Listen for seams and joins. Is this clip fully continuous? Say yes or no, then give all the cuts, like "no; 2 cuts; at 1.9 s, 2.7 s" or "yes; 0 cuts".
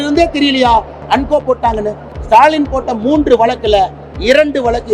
no; 1 cut; at 2.1 s